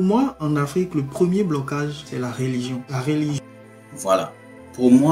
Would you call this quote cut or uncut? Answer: uncut